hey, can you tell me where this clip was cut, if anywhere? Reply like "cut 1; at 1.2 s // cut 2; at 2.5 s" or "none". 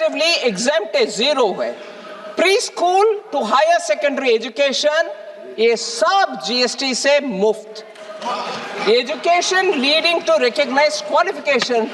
none